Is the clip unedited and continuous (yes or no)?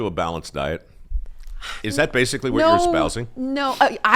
yes